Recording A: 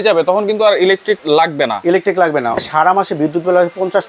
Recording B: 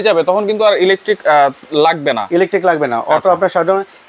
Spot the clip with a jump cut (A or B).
A